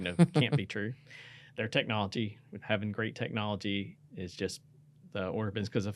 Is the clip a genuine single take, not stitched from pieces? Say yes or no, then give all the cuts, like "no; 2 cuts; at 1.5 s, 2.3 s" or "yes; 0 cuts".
no; 1 cut; at 2.6 s